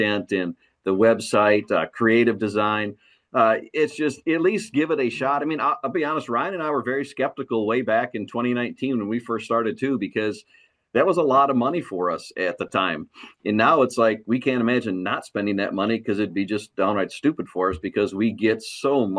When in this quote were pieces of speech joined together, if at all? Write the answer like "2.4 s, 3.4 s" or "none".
none